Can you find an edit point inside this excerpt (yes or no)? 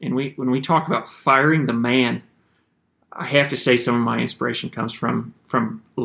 no